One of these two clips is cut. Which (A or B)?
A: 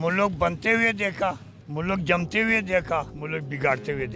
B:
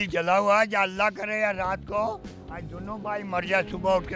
A